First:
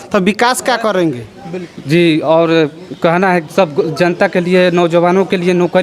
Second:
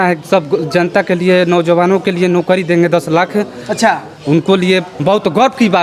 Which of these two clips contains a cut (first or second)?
first